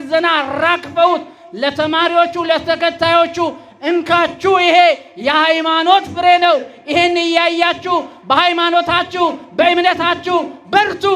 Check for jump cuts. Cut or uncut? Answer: uncut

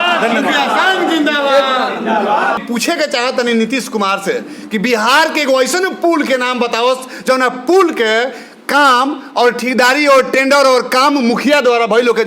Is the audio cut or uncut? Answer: cut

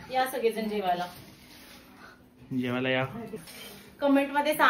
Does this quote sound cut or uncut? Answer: cut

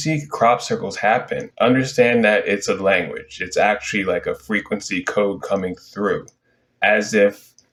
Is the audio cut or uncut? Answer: uncut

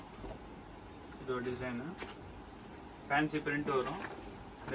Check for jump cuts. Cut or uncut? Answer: uncut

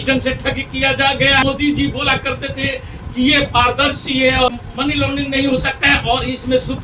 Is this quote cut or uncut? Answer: cut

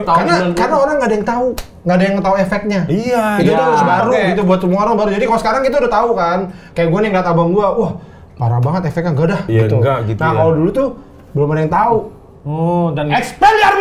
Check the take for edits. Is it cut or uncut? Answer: uncut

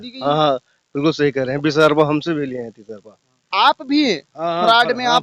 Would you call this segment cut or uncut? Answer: uncut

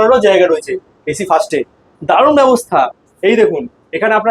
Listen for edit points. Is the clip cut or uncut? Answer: uncut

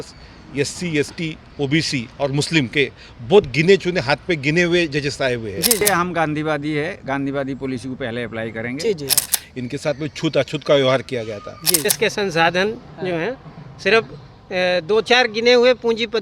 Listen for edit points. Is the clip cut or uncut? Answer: cut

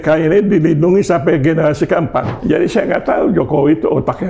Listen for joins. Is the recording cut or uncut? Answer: cut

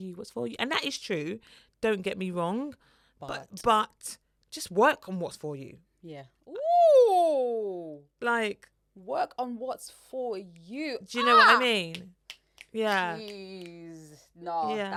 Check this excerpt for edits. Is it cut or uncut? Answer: uncut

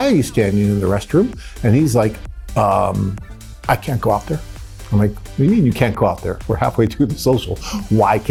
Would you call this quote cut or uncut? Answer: uncut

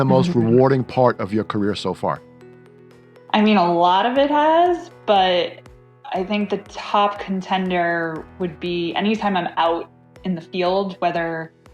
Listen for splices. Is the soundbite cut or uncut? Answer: cut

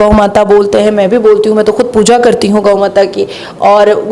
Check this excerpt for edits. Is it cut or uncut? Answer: uncut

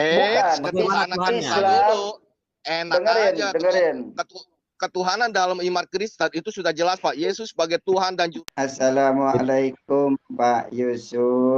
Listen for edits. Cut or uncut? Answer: cut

